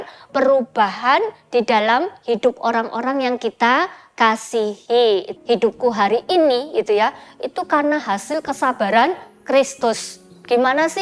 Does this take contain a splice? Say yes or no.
yes